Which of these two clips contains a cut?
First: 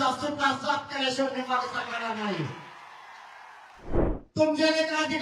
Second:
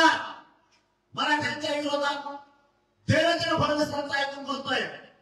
first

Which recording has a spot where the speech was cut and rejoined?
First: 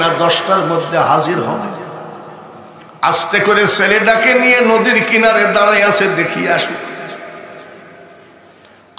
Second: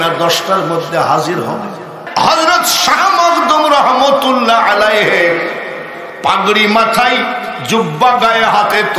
second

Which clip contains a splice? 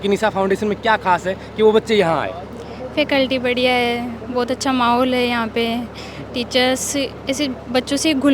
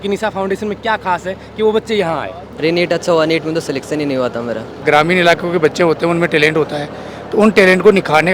second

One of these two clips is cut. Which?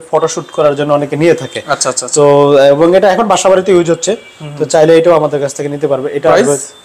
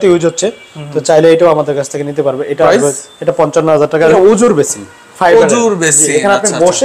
second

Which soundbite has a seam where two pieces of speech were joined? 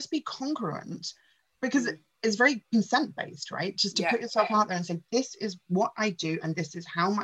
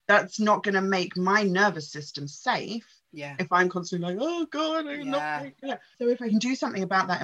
second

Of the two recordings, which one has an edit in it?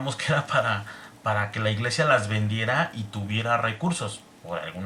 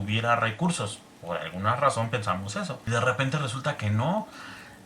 second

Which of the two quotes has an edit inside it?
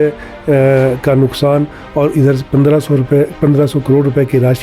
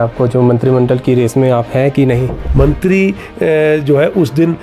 second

